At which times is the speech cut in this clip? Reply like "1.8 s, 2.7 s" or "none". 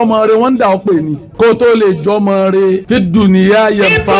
1.2 s, 2.8 s